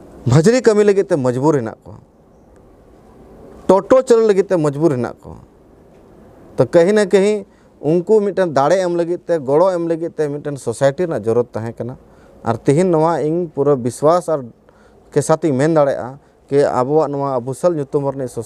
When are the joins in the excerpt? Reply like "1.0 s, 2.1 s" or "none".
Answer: none